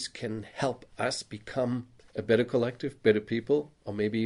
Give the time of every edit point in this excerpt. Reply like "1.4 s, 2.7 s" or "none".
2.0 s